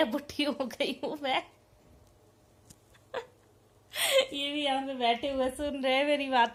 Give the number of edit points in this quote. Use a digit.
0